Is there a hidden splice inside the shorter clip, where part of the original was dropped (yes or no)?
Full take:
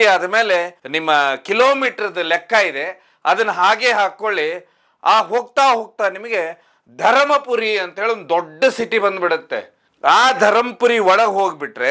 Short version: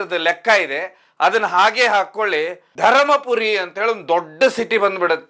yes